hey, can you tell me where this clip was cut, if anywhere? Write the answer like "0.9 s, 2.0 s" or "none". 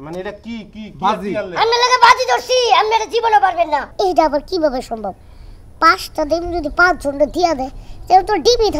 3.9 s